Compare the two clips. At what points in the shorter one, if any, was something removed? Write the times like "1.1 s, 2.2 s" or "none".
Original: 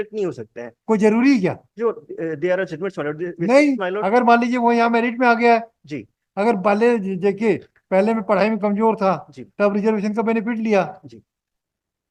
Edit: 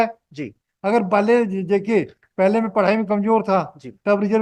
none